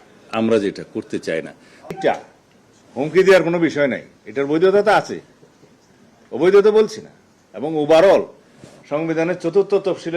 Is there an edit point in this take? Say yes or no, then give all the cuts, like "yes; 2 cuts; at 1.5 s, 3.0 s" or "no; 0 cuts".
yes; 1 cut; at 2.0 s